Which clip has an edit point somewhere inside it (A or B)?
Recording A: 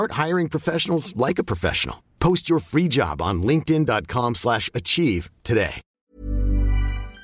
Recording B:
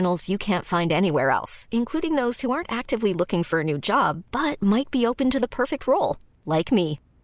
A